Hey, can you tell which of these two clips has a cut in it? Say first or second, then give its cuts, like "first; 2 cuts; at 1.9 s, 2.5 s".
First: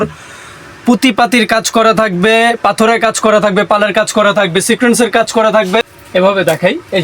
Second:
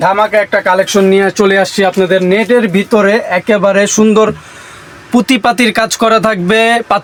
first; 1 cut; at 5.9 s